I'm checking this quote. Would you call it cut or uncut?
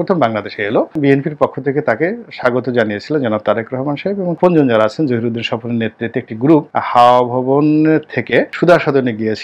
cut